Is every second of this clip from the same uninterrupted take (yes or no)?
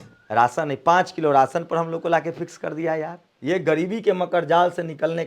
no